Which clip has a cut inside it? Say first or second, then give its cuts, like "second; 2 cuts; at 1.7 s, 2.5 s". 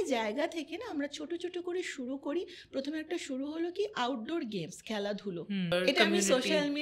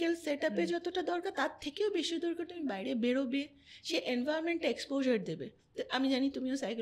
first; 1 cut; at 5.7 s